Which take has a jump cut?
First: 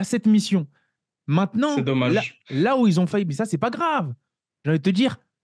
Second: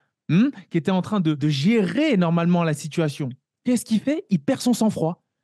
second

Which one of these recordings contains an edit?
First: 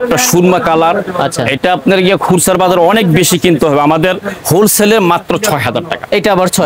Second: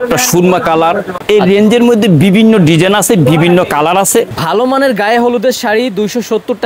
second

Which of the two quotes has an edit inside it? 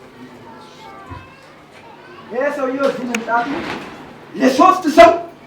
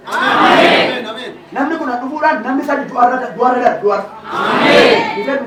first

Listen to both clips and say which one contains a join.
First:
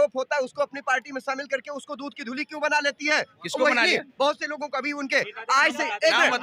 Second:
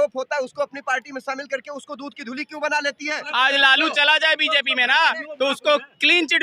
second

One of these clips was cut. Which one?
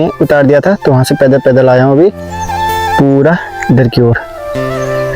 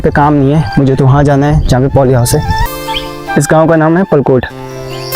second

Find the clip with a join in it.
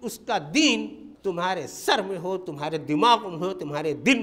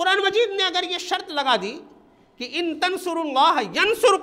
first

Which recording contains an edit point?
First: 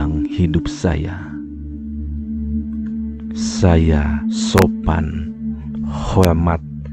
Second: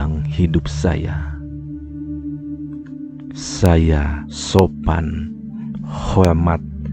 second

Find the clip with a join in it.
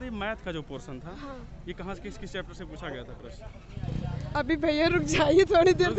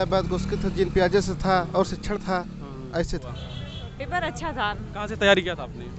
second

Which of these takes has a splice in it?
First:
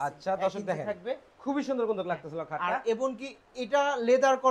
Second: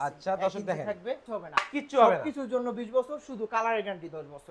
second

